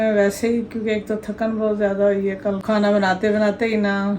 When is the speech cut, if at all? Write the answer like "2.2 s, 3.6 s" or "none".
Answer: 2.6 s